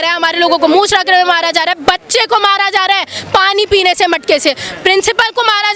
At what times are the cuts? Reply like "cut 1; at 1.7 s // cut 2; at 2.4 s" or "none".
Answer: none